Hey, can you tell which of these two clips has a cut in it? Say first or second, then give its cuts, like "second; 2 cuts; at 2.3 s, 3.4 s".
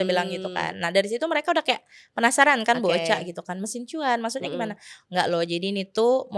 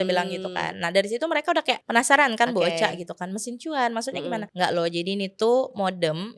second; 2 cuts; at 1.8 s, 4.5 s